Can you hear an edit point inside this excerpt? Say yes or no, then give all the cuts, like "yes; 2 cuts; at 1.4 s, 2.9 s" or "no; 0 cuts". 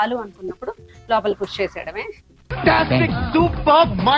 no; 0 cuts